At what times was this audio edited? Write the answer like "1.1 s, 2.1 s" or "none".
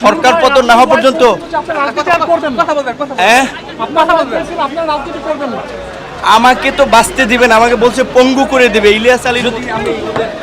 9.4 s